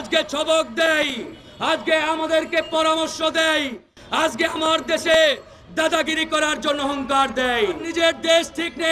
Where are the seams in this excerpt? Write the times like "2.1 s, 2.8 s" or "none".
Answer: 7.9 s

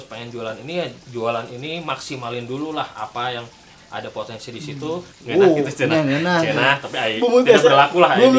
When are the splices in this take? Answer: 5.1 s

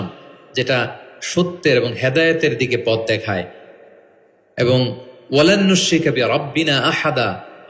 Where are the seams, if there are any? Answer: none

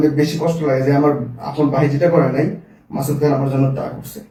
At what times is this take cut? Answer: none

